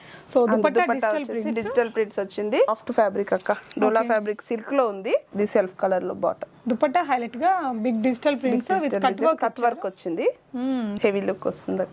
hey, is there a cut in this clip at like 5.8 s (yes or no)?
no